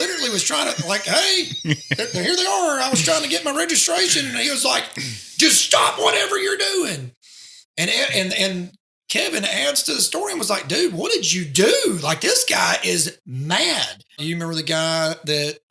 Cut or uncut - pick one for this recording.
cut